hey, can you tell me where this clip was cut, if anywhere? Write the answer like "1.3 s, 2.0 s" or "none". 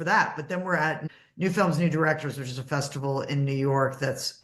1.0 s